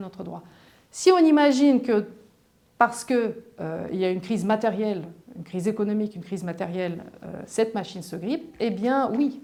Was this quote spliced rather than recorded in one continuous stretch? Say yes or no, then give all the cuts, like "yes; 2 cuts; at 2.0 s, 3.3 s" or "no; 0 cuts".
no; 0 cuts